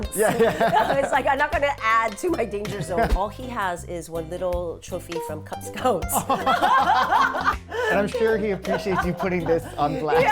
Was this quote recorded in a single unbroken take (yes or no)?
no